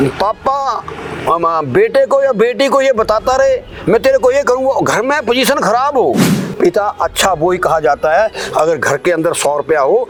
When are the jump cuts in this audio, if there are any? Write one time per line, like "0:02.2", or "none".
none